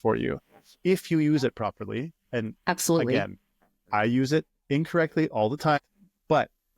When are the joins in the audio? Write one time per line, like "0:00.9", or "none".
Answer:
0:05.8